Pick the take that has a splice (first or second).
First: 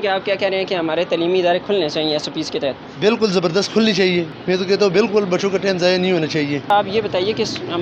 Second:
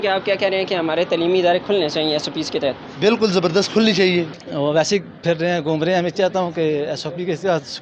second